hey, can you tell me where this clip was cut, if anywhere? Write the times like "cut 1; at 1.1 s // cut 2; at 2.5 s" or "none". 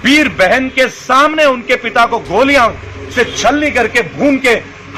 none